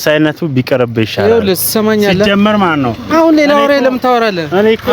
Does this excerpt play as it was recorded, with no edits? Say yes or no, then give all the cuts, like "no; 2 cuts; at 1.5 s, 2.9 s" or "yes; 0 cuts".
yes; 0 cuts